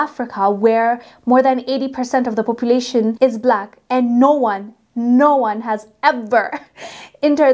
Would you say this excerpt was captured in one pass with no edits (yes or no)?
yes